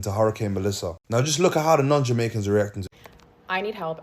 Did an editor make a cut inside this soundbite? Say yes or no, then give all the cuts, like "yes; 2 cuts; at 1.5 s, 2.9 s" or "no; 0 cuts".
yes; 1 cut; at 2.8 s